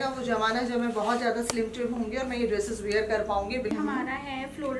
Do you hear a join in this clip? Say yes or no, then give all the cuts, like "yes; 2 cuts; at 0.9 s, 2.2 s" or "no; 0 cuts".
yes; 1 cut; at 3.7 s